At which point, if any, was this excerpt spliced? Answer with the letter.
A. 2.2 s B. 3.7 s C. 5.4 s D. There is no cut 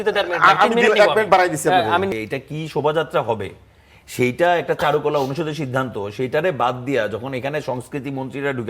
A